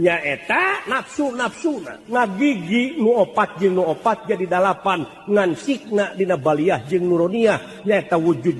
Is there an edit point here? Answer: yes; 2 cuts; at 0.8 s, 2.0 s

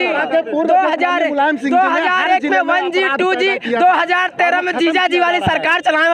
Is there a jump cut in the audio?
no; 0 cuts

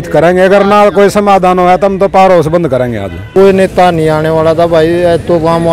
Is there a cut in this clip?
yes; 1 cut; at 3.3 s

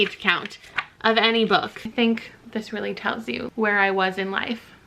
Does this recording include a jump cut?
yes; 2 cuts; at 1.8 s, 3.5 s

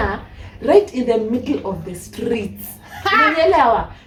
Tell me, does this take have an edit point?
no; 0 cuts

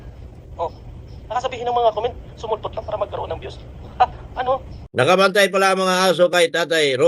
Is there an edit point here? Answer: yes; 1 cut; at 4.9 s

